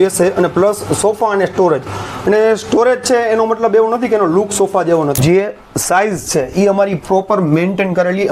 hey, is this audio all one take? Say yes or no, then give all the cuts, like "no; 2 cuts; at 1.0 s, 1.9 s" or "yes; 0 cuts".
no; 1 cut; at 5.2 s